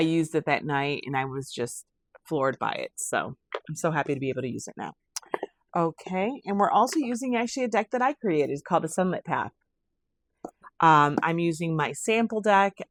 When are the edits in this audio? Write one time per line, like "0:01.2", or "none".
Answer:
none

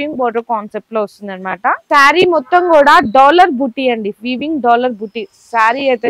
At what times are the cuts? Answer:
0:01.8

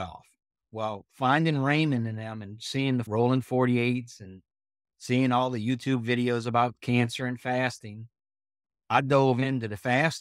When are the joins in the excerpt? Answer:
0:03.1

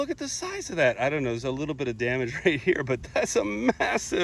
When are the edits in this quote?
none

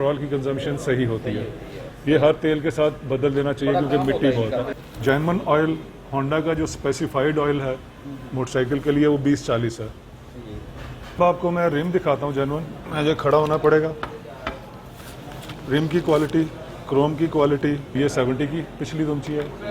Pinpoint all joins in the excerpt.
0:04.7
0:11.2
0:17.9

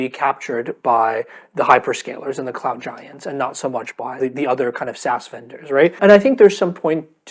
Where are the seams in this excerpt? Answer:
0:04.1
0:06.0

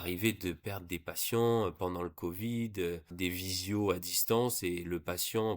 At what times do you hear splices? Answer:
0:03.1

